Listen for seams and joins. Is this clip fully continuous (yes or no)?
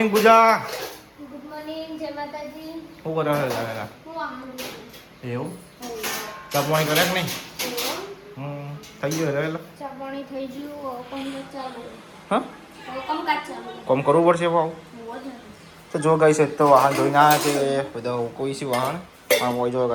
yes